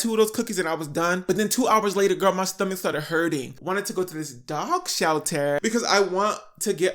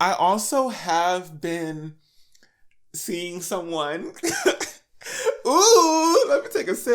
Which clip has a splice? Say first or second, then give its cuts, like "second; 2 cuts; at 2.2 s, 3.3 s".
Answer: first; 3 cuts; at 1.2 s, 3.5 s, 5.6 s